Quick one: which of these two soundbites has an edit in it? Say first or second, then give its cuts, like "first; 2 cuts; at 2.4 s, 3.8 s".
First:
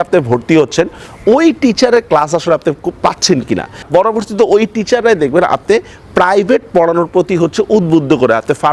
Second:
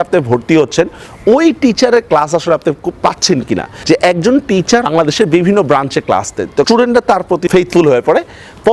first; 1 cut; at 3.8 s